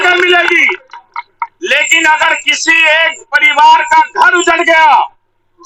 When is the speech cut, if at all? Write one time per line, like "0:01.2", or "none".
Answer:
none